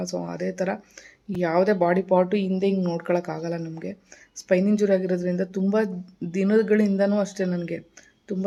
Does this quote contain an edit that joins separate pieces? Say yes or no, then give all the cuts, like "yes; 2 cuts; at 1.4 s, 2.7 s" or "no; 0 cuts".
no; 0 cuts